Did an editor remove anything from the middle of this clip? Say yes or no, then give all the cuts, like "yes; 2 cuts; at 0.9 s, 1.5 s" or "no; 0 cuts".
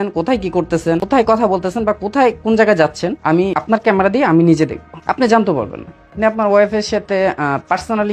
yes; 4 cuts; at 1.0 s, 3.4 s, 4.9 s, 6.1 s